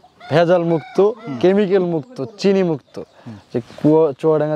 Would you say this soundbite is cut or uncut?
uncut